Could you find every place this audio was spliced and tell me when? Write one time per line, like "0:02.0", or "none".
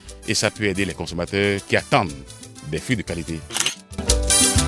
0:03.5